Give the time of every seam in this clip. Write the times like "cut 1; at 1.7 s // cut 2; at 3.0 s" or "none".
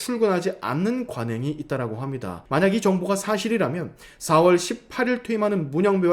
cut 1; at 2.3 s